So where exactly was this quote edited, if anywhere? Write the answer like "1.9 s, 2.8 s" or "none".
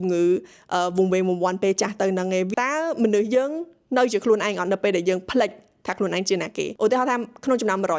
2.5 s, 6.7 s